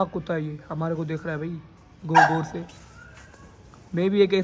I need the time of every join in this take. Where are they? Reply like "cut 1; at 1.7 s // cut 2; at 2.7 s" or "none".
none